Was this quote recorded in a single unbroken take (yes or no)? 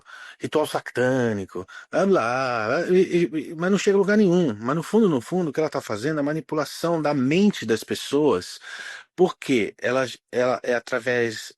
yes